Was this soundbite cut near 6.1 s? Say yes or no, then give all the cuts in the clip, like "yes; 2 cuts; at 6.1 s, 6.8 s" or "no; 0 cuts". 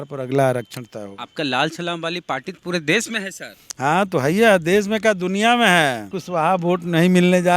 yes; 1 cut; at 6.1 s